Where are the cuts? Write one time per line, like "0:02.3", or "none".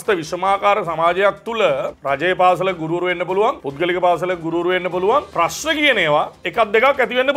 0:01.9
0:03.6
0:05.3
0:06.4